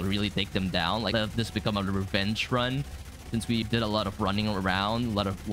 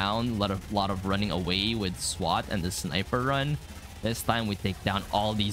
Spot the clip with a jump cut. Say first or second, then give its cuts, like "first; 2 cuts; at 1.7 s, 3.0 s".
first; 2 cuts; at 1.1 s, 3.6 s